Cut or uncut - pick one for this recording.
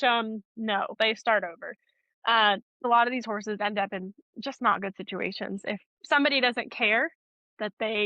cut